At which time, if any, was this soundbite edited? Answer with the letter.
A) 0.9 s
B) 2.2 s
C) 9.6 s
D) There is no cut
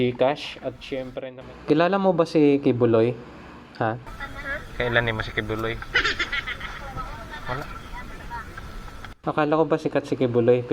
A